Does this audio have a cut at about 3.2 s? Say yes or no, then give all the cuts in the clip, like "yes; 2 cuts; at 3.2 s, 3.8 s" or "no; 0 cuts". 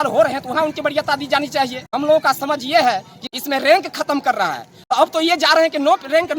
yes; 3 cuts; at 1.9 s, 3.2 s, 4.7 s